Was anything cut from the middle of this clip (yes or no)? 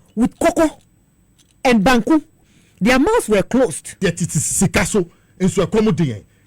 yes